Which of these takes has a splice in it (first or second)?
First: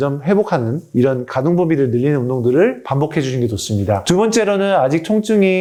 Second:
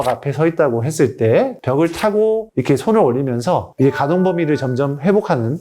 second